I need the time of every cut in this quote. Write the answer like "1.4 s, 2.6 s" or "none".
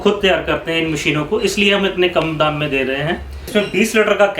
3.3 s

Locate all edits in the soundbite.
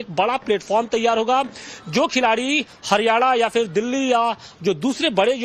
none

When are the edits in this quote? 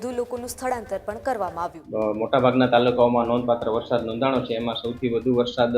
1.9 s

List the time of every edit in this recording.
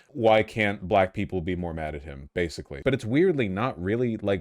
2.8 s

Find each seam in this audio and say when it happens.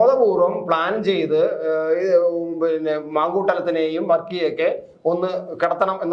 none

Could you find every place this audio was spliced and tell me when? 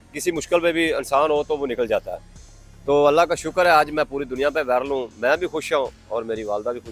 none

